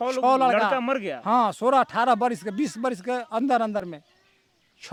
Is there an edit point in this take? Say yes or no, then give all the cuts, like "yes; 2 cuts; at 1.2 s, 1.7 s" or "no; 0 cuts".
no; 0 cuts